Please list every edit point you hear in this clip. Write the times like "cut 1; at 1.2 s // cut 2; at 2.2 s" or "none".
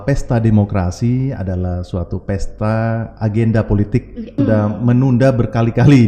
cut 1; at 4.4 s